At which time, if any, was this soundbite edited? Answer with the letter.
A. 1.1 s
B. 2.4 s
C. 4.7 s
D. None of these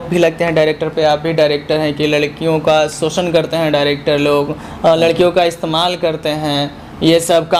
D